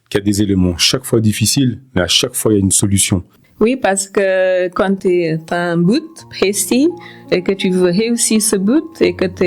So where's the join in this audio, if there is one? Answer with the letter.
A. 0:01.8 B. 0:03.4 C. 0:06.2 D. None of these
B